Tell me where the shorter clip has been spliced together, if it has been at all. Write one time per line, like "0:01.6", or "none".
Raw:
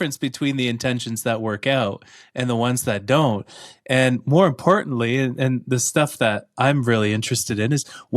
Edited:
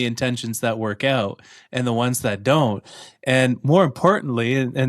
none